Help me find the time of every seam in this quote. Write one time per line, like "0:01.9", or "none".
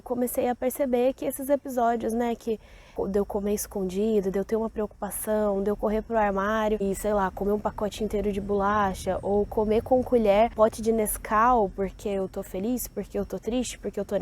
0:02.9
0:06.8
0:10.5